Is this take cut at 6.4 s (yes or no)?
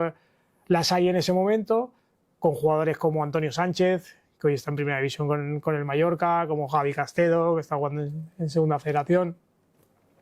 no